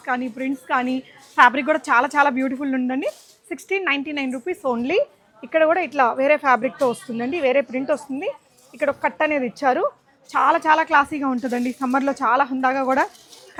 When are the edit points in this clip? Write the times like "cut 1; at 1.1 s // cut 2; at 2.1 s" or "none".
none